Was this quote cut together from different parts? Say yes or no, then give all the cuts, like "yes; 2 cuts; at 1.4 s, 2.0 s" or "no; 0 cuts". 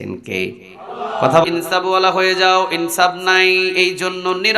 yes; 1 cut; at 1.4 s